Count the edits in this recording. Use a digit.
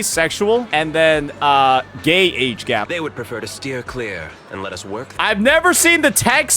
1